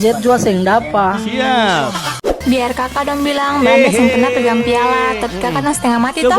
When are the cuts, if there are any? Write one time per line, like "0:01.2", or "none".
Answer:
0:02.1